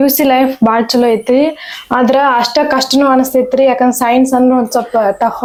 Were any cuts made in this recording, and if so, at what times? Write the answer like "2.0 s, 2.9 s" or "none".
none